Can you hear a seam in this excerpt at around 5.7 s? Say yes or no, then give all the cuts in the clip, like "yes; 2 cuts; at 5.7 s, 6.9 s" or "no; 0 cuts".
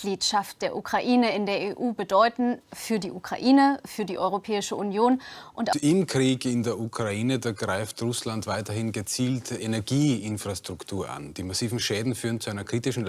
yes; 1 cut; at 5.7 s